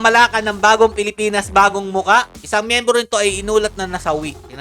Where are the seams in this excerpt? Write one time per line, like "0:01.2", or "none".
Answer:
0:02.3